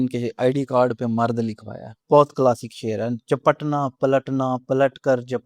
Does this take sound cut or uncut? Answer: cut